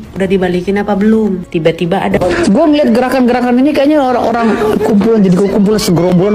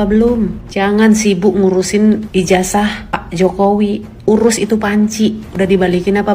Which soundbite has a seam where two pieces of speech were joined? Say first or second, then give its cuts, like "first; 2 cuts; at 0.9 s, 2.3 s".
first; 1 cut; at 2.1 s